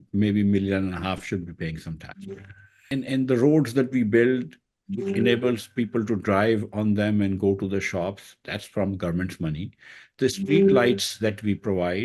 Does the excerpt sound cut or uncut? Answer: cut